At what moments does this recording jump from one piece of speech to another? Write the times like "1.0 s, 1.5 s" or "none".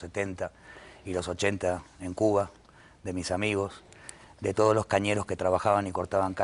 2.9 s